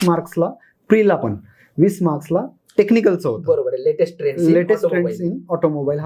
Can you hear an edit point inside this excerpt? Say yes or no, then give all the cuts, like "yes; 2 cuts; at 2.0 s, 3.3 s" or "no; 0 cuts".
no; 0 cuts